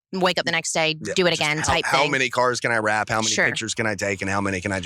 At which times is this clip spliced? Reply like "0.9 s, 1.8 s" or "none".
none